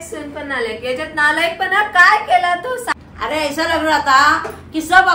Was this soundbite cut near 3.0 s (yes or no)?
yes